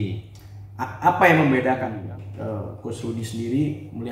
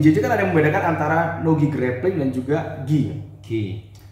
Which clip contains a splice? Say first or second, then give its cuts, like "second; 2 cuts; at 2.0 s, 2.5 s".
first; 1 cut; at 2.0 s